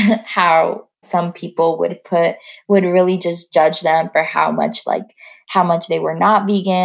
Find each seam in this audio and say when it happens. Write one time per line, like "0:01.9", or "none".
none